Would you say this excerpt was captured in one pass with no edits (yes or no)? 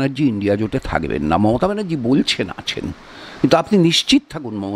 yes